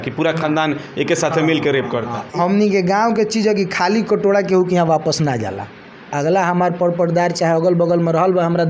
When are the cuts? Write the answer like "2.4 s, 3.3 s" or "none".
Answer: 2.4 s